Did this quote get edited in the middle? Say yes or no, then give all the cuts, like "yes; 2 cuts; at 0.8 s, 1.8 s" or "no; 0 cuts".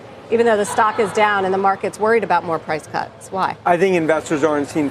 no; 0 cuts